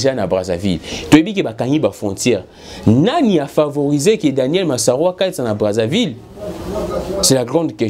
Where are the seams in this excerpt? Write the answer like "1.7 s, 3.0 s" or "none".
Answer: none